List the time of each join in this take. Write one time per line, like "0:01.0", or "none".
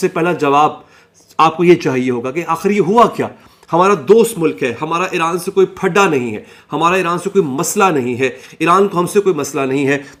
none